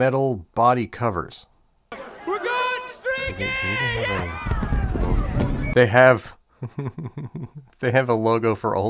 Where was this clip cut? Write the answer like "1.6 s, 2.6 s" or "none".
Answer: none